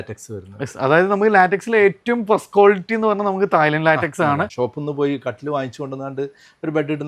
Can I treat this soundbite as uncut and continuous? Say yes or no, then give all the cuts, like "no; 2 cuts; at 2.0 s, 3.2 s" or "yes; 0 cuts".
no; 1 cut; at 4.5 s